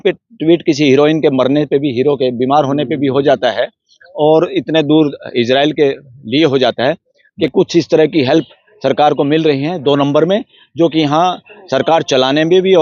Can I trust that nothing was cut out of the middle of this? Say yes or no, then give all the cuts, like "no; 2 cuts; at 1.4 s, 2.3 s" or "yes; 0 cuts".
no; 1 cut; at 7.2 s